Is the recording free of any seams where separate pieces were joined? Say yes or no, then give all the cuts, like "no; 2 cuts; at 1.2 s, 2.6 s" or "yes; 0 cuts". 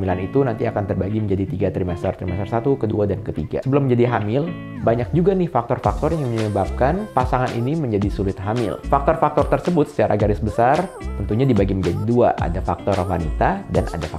yes; 0 cuts